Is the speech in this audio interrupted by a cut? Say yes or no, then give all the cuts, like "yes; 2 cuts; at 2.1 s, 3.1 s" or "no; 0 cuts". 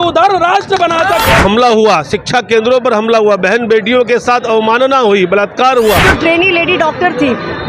yes; 2 cuts; at 1.4 s, 6.0 s